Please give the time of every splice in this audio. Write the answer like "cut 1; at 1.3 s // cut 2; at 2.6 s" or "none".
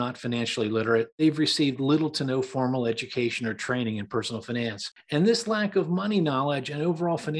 cut 1; at 1.1 s // cut 2; at 4.9 s

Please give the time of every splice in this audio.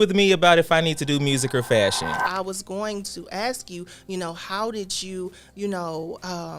cut 1; at 2.3 s

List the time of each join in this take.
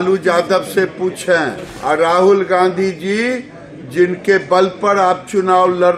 cut 1; at 1.7 s

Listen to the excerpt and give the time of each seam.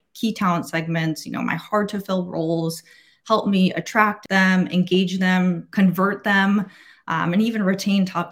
cut 1; at 4.2 s // cut 2; at 5.6 s

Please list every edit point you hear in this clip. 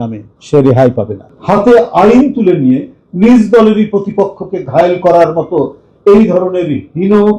cut 1; at 1.2 s

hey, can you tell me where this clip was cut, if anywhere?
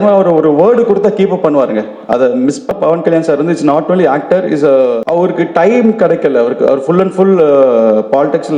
cut 1; at 2.7 s // cut 2; at 5.0 s

